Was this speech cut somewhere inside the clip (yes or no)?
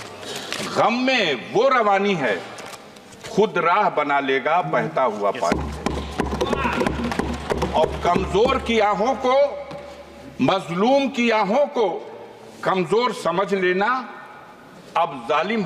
no